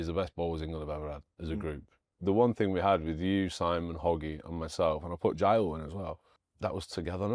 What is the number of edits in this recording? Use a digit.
2